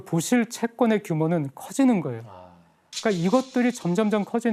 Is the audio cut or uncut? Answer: uncut